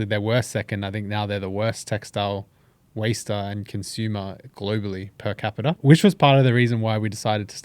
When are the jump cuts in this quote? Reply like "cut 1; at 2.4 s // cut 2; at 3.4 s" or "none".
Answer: cut 1; at 5.8 s